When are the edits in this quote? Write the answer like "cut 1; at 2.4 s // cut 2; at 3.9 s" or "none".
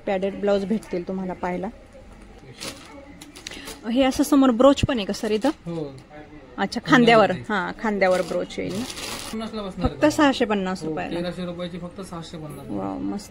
cut 1; at 2.4 s // cut 2; at 9.3 s